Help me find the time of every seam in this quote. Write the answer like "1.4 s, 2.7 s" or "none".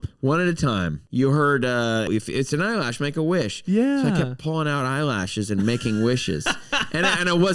1.0 s, 2.1 s